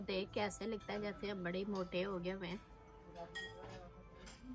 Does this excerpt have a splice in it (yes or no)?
no